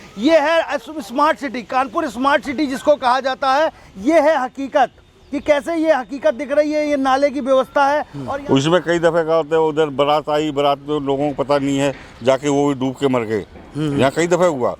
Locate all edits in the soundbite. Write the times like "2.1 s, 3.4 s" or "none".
8.2 s